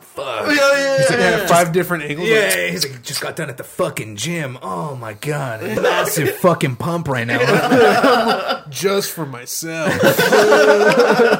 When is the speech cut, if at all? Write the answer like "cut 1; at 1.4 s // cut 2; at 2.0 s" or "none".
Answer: cut 1; at 5.8 s